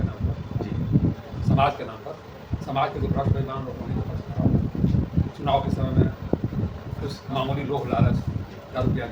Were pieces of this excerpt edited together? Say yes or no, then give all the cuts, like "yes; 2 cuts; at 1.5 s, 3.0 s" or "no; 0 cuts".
no; 0 cuts